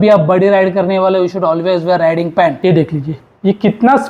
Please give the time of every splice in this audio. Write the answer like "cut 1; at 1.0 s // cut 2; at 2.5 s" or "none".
cut 1; at 2.6 s